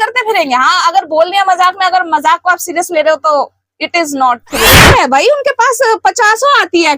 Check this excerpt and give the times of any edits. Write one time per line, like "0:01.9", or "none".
0:04.8